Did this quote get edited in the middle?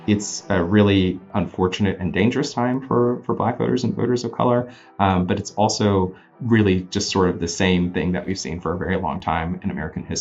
yes; 2 cuts; at 1.3 s, 6.3 s

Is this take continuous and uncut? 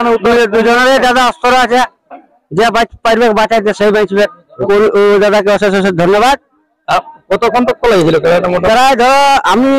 no; 1 cut; at 4.5 s

